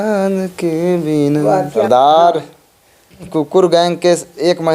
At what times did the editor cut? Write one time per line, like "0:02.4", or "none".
0:01.8
0:03.2

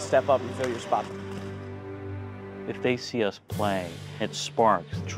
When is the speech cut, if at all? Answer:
0:01.0

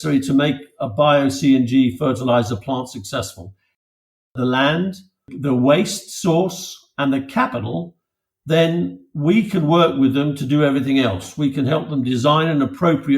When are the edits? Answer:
0:04.1
0:05.3

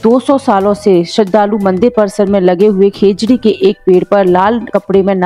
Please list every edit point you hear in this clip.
none

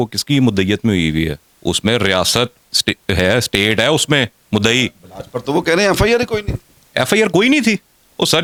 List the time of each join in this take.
none

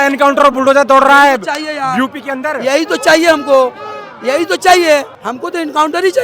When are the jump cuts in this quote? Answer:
0:05.2

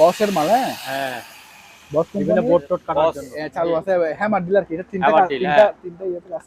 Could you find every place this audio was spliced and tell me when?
0:02.9

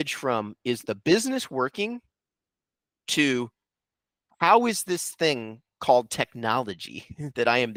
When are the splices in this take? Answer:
none

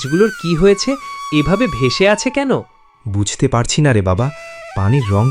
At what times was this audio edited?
none

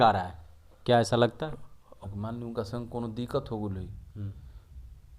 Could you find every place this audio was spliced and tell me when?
0:02.0

